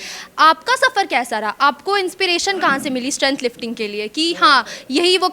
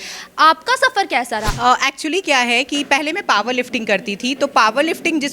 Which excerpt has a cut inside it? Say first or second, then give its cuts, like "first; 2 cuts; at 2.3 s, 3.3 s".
second; 1 cut; at 1.5 s